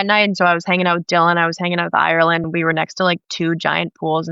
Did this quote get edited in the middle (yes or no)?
yes